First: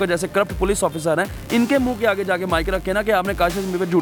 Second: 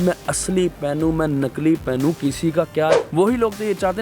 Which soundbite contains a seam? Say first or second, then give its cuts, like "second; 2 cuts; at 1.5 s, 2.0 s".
second; 1 cut; at 3.0 s